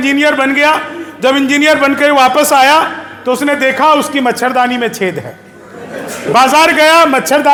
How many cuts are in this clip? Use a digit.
0